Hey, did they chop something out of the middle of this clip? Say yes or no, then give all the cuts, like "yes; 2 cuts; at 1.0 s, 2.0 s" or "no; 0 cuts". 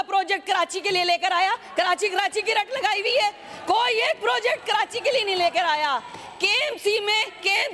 no; 0 cuts